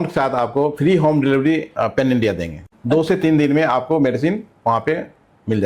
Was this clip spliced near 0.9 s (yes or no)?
no